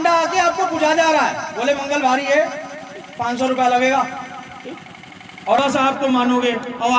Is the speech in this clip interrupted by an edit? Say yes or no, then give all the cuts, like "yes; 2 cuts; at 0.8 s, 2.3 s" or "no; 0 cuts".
yes; 1 cut; at 5.6 s